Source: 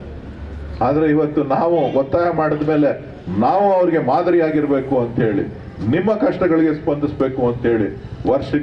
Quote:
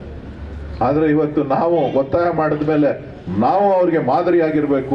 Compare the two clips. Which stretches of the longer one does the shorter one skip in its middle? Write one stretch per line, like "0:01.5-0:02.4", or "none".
none